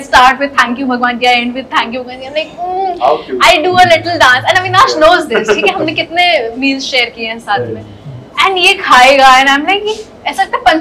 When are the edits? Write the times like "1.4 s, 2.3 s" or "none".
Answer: none